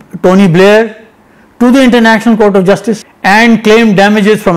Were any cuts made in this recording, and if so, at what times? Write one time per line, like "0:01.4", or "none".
0:03.1